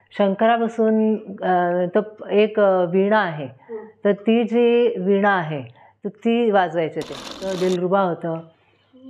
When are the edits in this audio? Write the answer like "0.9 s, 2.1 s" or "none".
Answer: 7.5 s